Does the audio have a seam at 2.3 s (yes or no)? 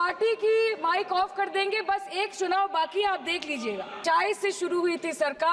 no